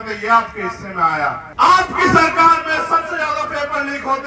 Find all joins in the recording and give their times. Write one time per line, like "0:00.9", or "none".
0:01.4